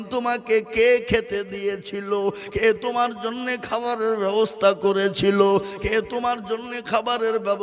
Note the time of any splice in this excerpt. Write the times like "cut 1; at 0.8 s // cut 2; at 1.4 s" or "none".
none